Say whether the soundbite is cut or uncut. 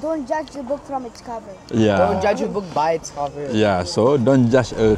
uncut